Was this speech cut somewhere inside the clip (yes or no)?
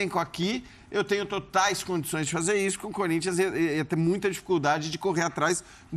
no